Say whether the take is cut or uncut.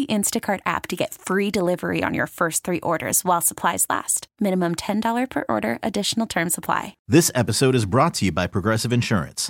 cut